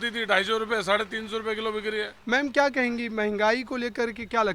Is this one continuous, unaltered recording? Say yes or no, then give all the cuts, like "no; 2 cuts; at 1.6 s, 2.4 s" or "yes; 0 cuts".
no; 1 cut; at 2.1 s